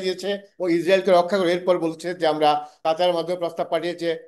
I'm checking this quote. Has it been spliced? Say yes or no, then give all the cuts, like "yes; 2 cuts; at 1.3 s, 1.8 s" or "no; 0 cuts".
yes; 1 cut; at 2.7 s